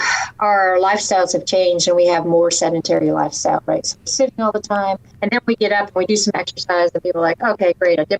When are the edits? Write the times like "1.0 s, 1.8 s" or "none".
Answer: 5.1 s